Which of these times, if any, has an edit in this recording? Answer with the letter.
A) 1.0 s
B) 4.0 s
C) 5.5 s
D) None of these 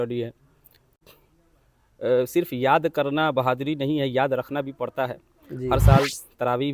A